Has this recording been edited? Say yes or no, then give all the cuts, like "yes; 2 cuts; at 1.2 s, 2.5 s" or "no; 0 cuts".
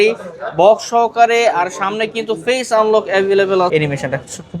yes; 1 cut; at 3.7 s